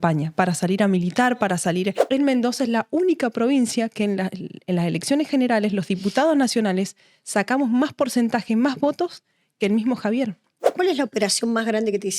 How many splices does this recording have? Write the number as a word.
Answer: two